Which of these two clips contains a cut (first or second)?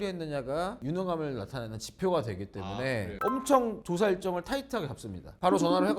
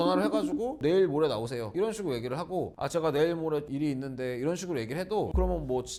first